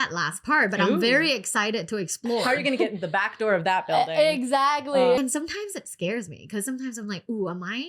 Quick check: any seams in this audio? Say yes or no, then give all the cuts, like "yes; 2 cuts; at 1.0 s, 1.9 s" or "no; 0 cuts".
yes; 2 cuts; at 2.4 s, 5.2 s